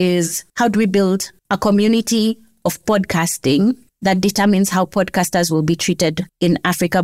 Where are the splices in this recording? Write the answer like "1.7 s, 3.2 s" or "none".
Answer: none